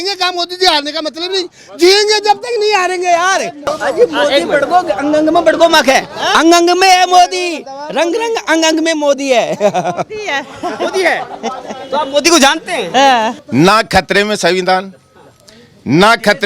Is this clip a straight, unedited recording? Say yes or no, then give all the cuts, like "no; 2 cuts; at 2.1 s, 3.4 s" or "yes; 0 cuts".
no; 2 cuts; at 3.8 s, 13.4 s